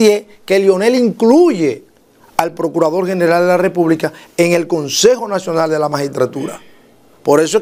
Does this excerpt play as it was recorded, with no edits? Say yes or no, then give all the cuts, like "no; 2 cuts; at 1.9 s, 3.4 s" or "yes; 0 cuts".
yes; 0 cuts